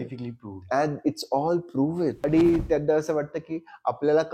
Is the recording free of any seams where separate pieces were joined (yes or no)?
no